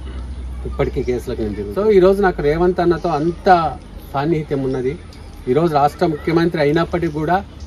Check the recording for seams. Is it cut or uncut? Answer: cut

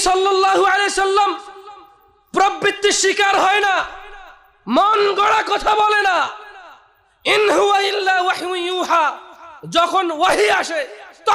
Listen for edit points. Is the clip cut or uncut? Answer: uncut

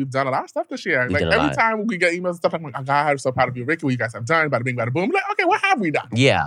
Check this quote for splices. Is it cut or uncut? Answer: uncut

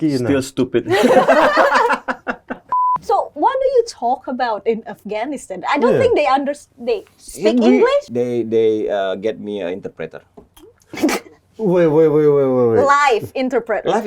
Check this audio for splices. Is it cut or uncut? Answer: cut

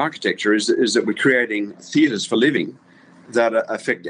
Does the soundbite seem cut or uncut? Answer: cut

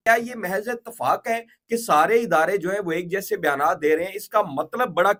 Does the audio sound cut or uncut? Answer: uncut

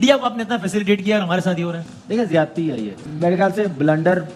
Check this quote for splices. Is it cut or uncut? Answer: cut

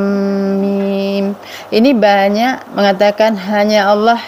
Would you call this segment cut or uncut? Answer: cut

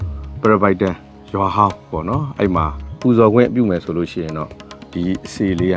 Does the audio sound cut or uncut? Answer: cut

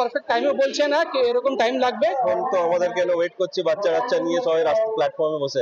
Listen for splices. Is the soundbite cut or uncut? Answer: cut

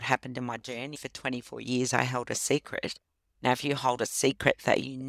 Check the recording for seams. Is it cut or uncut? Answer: cut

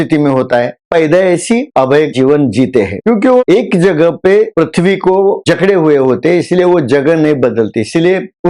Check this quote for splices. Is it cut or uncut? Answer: cut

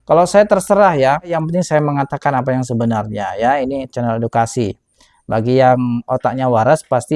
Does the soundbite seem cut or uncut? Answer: cut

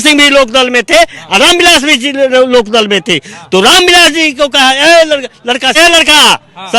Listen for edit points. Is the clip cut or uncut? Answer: cut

